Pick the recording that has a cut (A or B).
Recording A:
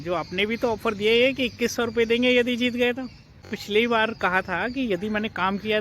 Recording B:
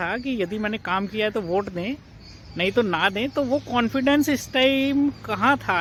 A